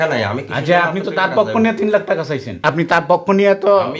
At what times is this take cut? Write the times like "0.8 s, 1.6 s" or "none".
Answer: 2.6 s